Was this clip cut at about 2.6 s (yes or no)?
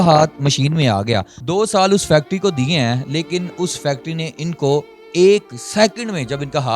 no